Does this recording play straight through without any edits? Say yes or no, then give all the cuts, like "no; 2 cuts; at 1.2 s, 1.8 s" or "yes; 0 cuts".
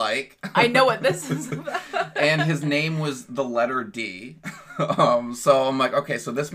yes; 0 cuts